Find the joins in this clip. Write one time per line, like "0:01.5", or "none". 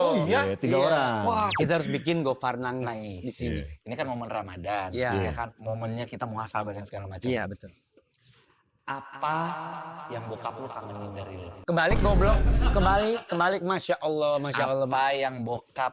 0:01.5